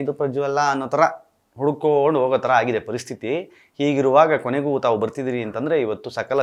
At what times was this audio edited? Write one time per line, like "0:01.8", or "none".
none